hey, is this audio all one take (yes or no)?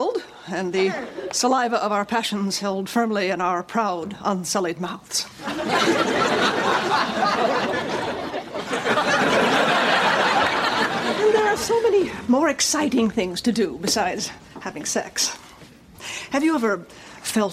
yes